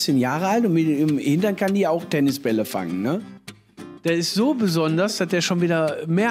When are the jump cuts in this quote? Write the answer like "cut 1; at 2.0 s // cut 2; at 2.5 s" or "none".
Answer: cut 1; at 3.7 s